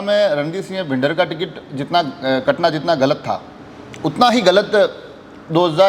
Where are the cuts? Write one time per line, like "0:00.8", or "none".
none